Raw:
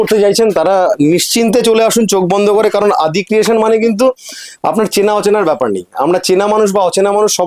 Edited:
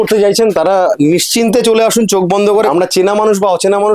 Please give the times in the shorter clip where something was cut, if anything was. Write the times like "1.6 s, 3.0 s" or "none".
2.7 s